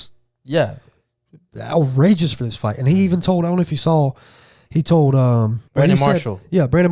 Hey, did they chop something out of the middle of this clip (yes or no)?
yes